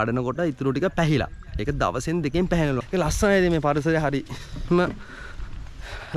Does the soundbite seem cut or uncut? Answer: cut